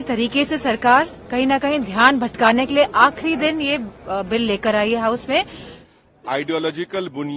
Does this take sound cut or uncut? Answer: cut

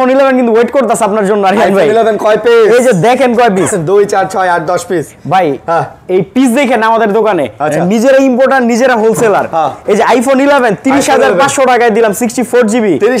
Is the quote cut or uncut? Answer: uncut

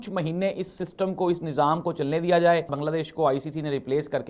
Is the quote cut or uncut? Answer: cut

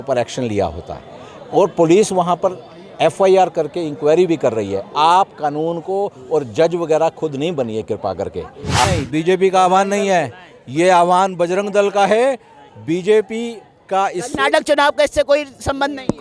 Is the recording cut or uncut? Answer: cut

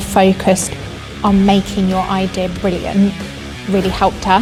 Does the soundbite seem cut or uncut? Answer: uncut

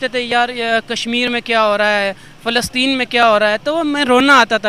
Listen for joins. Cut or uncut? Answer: uncut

